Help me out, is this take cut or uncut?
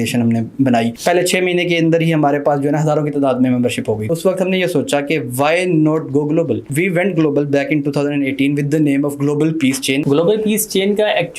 cut